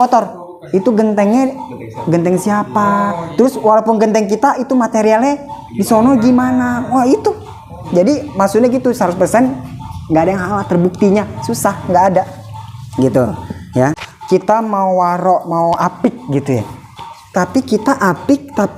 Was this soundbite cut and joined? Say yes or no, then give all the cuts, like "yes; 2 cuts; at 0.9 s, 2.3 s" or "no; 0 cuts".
yes; 1 cut; at 14.1 s